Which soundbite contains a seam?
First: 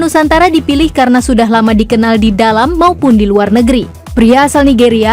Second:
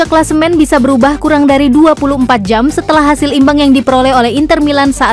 first; 1 cut; at 4.0 s

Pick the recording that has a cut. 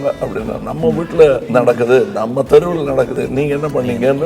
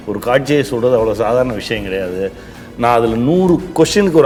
first; 2 cuts; at 1.4 s, 3.1 s

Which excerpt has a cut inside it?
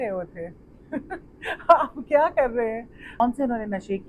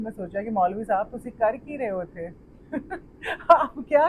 first; 1 cut; at 3.2 s

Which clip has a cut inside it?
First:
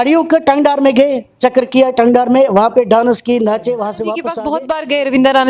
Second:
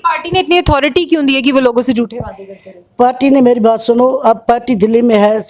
first; 1 cut; at 4.3 s

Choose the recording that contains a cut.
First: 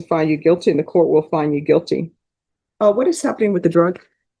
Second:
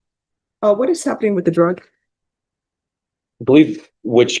first; 1 cut; at 1.3 s

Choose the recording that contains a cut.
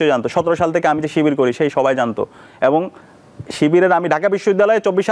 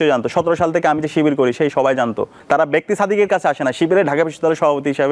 second; 1 cut; at 2.4 s

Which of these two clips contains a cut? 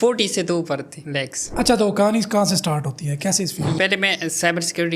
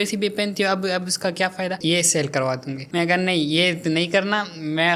first; 2 cuts; at 1.4 s, 3.8 s

